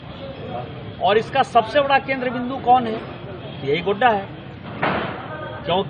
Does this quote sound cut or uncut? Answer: uncut